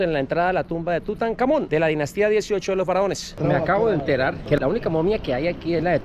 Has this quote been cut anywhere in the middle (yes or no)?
no